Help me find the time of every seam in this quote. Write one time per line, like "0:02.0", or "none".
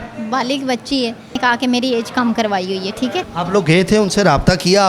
0:01.4
0:03.3

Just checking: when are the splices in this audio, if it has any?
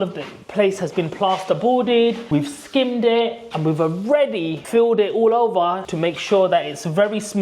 0:02.2

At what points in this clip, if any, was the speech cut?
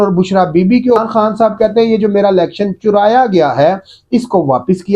0:01.0

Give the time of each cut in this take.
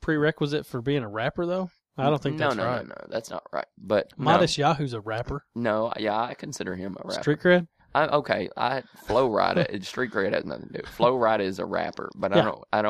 none

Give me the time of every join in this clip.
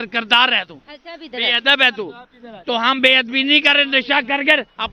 none

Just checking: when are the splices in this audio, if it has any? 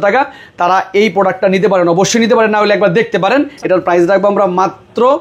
0:03.5

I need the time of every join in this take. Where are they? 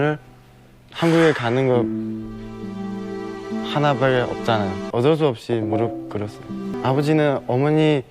0:04.8
0:06.7

